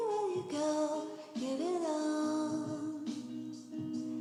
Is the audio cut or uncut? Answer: uncut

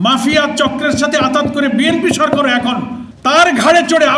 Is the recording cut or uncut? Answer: cut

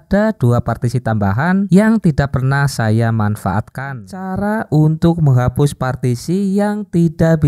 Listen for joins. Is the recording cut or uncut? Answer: cut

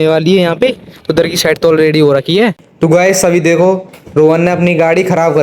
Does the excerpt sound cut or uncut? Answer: cut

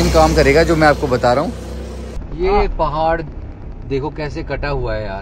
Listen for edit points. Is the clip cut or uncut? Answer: cut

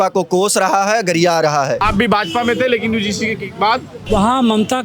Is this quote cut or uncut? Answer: cut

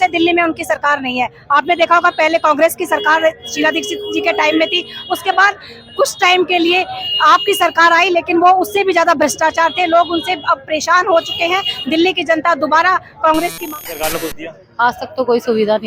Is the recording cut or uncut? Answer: cut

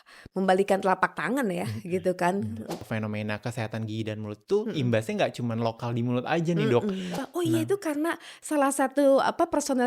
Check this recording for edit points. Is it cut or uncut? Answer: cut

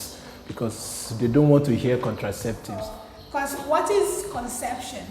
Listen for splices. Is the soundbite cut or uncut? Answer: cut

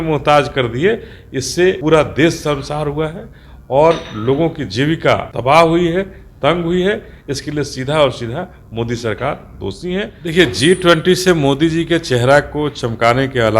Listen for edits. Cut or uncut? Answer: cut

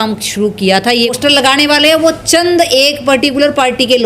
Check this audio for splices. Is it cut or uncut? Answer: cut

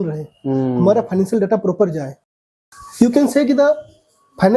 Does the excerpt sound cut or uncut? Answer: cut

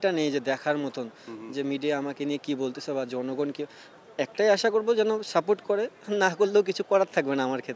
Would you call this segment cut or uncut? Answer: uncut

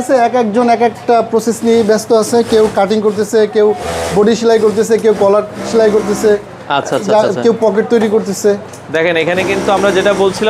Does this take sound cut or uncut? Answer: uncut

